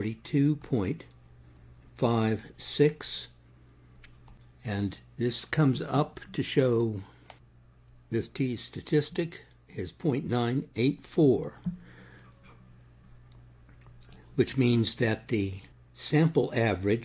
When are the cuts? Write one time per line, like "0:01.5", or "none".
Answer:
0:04.4